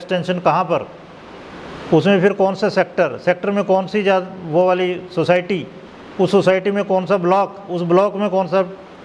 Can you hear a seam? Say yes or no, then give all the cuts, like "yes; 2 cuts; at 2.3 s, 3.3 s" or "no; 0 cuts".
no; 0 cuts